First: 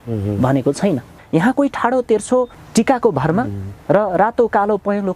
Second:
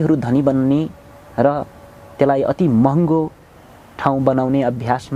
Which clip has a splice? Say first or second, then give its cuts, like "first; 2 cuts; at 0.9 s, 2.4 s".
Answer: first; 2 cuts; at 1.2 s, 2.6 s